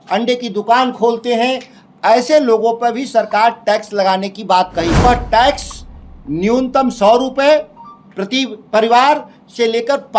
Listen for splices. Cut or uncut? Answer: cut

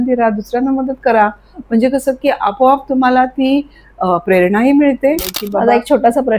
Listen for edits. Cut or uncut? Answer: cut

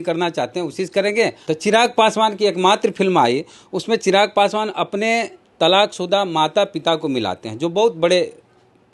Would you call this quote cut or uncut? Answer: cut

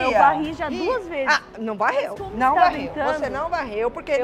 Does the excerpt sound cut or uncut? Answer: uncut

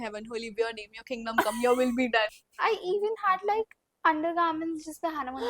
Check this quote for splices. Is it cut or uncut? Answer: cut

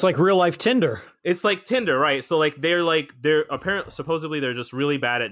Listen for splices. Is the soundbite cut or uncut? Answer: cut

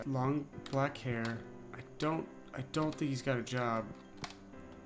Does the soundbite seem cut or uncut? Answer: uncut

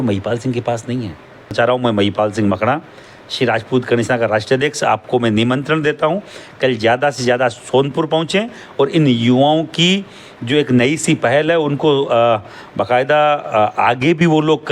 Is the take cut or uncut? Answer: cut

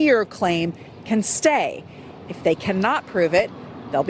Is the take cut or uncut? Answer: uncut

